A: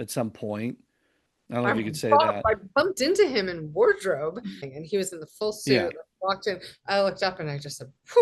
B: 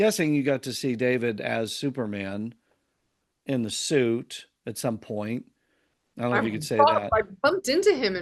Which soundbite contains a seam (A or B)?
A